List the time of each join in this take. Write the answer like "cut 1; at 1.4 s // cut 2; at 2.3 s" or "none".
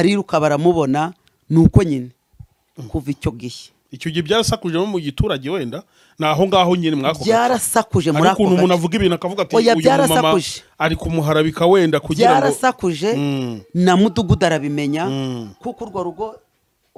none